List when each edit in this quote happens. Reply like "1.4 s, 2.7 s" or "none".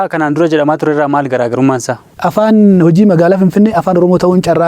2.1 s